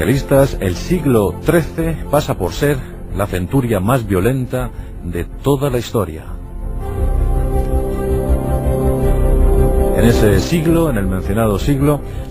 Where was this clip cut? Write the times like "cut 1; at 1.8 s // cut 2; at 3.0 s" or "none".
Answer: none